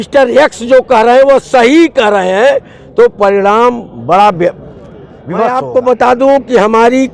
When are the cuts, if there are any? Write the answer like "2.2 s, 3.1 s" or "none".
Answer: 5.5 s